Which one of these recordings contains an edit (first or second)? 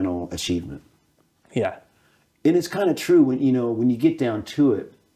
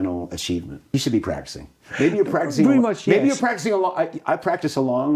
second